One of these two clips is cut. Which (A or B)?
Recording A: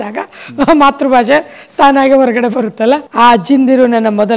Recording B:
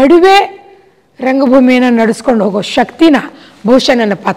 A